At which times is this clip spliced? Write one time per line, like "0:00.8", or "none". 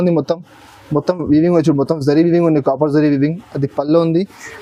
none